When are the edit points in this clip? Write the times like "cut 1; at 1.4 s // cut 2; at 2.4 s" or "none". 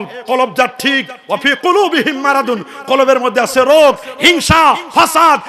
none